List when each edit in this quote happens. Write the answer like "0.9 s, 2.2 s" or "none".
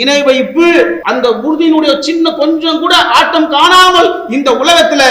1.0 s